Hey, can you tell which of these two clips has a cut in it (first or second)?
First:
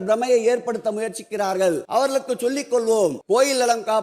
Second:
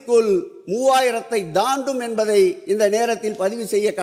first